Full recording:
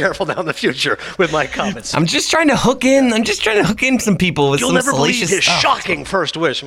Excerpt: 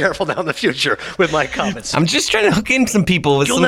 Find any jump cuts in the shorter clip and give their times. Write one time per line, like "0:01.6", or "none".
0:02.2